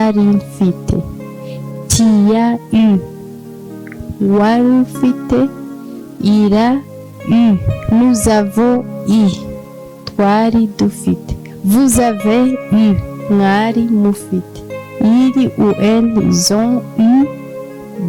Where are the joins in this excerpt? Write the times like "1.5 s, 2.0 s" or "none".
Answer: none